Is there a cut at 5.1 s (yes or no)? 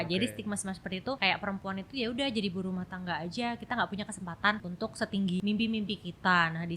yes